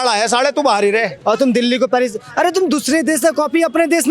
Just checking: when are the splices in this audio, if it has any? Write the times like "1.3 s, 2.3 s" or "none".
1.1 s